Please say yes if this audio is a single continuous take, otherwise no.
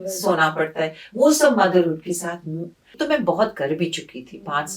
no